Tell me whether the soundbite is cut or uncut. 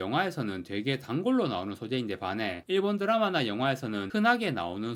uncut